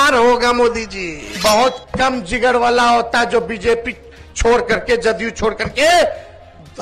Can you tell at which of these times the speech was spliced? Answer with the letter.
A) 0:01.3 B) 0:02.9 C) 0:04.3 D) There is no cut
A